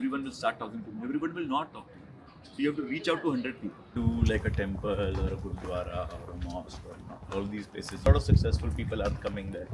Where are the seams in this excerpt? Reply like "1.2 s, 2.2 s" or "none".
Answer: 3.8 s